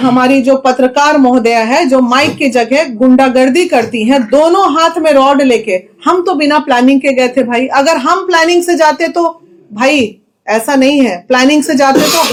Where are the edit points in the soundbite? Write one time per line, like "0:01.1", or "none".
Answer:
none